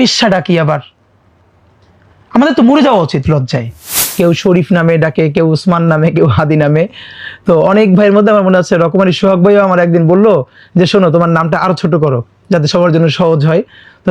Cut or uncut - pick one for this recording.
cut